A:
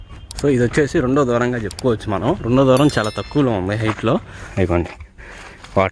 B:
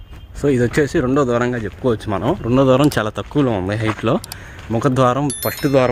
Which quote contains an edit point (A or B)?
A